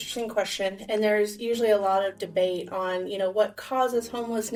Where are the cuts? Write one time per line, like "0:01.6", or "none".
none